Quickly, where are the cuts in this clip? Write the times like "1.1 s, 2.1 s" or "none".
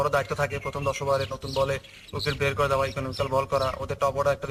none